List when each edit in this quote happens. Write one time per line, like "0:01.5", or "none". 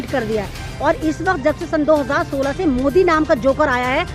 none